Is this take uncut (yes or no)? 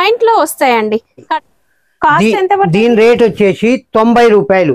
no